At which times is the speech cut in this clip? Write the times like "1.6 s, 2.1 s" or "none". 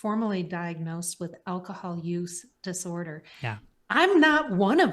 3.7 s